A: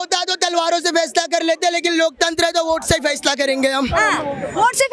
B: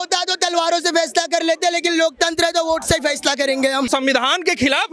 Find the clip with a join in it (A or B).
B